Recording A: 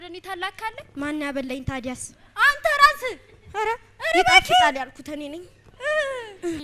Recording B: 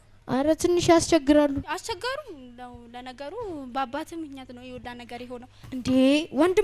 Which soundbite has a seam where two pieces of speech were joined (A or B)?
B